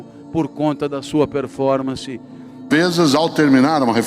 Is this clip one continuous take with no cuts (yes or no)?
no